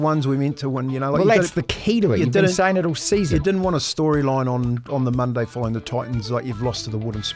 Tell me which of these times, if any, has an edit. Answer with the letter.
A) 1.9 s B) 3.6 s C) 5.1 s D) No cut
D